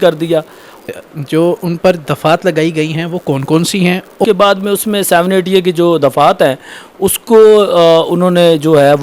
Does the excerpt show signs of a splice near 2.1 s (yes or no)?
no